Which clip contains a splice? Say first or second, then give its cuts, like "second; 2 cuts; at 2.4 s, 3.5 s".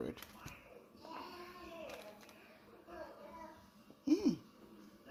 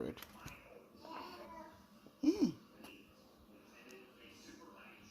second; 2 cuts; at 1.4 s, 2.8 s